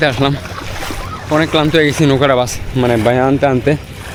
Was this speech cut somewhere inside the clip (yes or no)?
no